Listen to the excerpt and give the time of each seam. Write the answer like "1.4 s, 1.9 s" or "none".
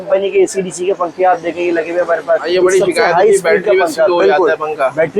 2.5 s